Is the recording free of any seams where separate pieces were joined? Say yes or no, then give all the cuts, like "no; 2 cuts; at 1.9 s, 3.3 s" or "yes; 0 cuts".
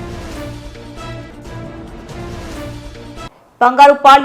yes; 0 cuts